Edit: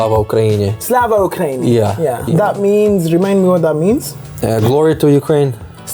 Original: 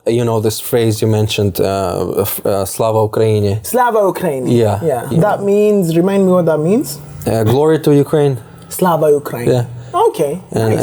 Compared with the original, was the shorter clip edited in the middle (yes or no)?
no